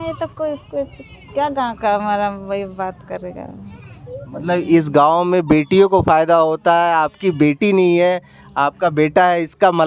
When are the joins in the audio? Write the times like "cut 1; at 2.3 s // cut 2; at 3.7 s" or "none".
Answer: none